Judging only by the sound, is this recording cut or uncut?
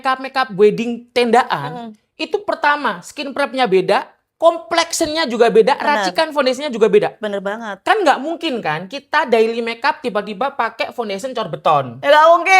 uncut